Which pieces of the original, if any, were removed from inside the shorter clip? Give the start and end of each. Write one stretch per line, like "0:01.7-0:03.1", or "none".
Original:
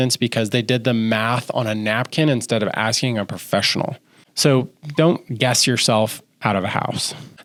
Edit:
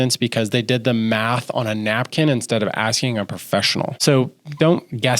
0:04.0-0:04.3